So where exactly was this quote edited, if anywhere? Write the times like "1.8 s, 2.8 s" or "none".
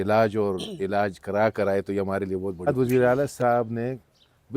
2.7 s